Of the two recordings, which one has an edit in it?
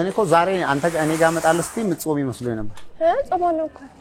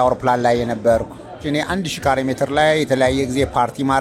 second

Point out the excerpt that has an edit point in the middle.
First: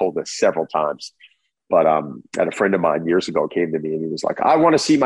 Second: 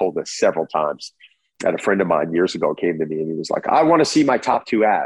second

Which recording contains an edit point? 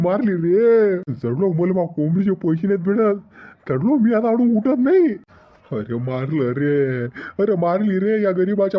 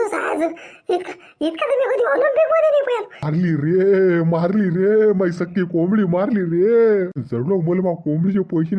second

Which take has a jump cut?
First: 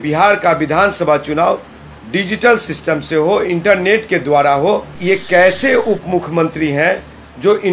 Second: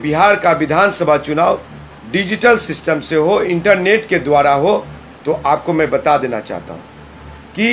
first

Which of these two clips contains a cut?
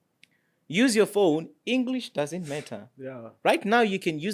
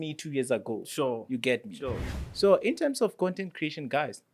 second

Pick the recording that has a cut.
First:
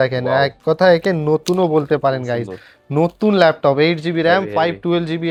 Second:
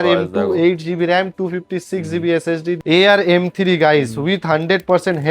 second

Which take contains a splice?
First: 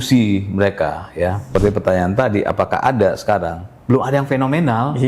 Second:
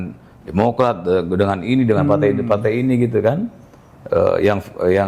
first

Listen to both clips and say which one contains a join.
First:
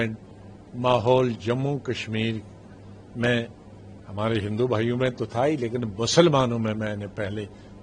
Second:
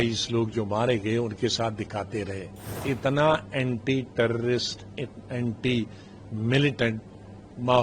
second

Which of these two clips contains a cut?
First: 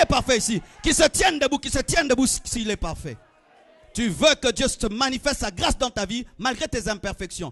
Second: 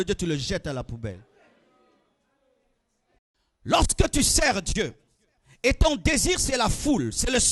second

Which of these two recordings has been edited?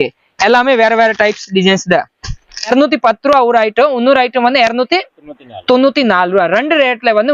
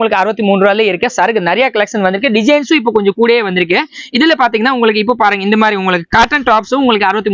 first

